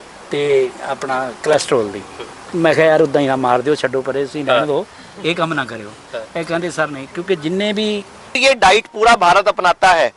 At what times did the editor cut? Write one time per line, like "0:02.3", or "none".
0:08.4